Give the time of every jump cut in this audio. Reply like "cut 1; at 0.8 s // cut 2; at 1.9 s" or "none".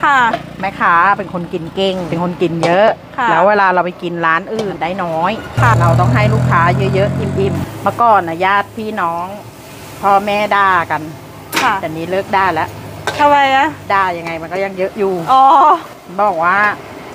cut 1; at 2.1 s // cut 2; at 4.7 s // cut 3; at 5.7 s // cut 4; at 7.7 s // cut 5; at 15.9 s